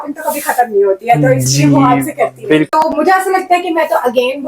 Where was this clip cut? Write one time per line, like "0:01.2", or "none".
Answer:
0:02.7